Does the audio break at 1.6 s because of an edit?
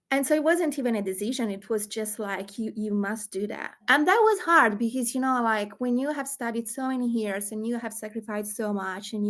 no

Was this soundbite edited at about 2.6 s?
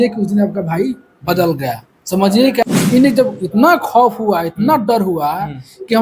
yes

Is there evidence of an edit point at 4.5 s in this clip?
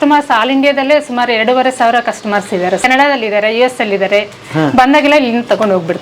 no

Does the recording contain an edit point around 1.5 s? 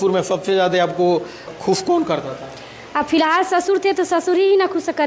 yes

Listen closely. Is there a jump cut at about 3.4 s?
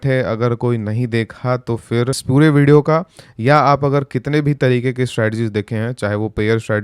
no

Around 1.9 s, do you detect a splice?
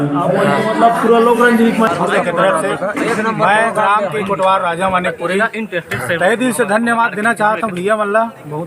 yes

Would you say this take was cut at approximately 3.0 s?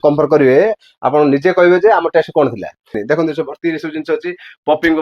yes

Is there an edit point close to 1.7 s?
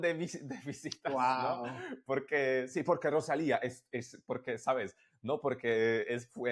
no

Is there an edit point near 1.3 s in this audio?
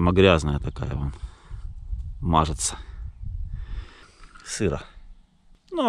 no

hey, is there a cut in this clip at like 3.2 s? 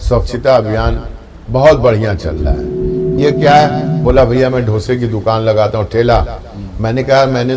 yes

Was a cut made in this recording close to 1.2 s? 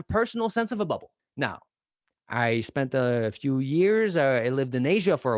yes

